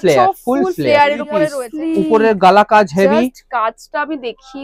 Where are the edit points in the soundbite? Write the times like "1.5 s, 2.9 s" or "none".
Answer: 1.6 s